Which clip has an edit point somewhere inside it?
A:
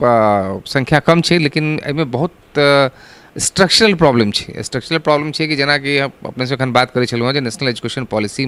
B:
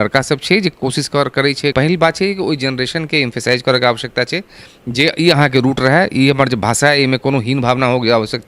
B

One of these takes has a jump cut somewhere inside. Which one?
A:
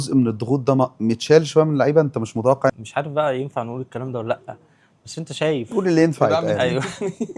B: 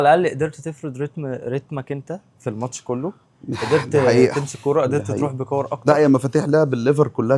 A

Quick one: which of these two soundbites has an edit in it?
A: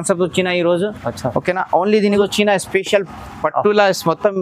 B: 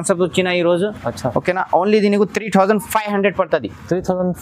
A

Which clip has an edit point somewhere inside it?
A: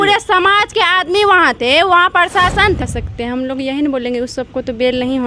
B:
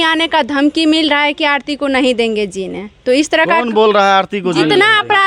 A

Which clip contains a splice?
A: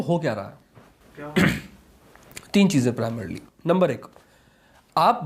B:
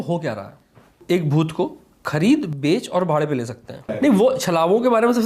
B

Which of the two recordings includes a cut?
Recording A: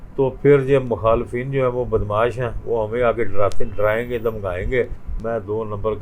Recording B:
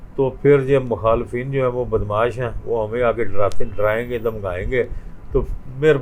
A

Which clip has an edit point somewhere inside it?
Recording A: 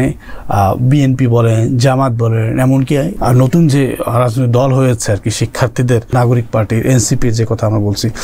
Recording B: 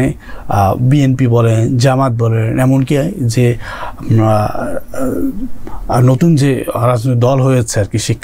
A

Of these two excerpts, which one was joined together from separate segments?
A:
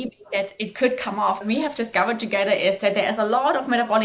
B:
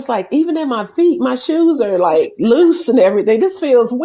A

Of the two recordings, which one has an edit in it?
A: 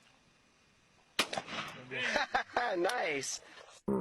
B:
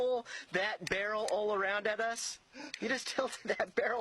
A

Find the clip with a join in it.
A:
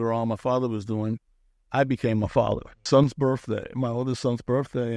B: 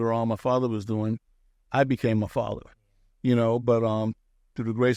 A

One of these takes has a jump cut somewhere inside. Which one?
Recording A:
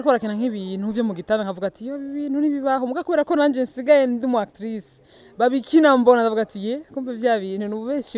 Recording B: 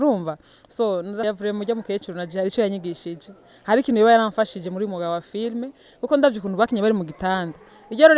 B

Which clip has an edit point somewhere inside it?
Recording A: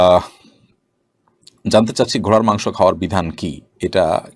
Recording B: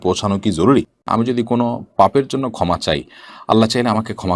B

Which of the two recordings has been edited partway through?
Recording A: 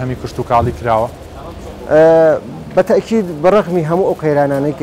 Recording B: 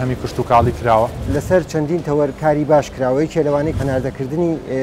B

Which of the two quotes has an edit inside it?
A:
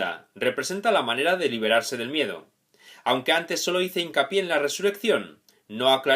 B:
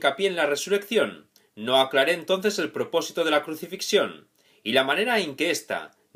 A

